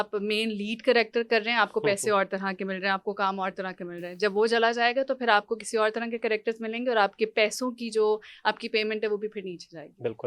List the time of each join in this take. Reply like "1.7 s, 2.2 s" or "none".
none